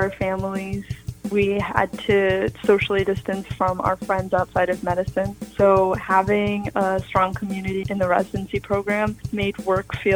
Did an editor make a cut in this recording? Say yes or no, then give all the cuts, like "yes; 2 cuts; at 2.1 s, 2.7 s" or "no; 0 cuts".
no; 0 cuts